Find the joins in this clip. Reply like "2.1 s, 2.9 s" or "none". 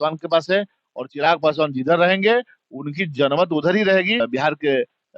4.2 s